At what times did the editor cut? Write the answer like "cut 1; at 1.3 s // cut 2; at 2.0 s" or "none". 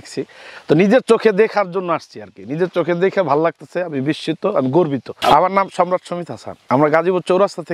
none